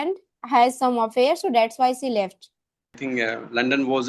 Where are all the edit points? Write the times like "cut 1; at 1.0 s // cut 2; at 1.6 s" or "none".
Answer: cut 1; at 3.0 s